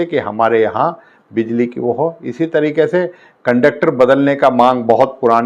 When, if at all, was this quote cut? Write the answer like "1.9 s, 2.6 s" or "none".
none